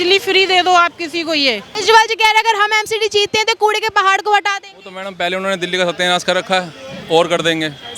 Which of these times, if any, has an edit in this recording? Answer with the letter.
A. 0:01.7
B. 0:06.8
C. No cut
A